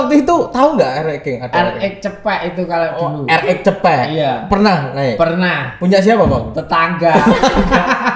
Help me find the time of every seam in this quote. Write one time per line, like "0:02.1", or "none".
none